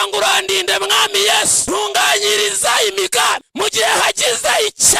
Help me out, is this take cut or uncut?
cut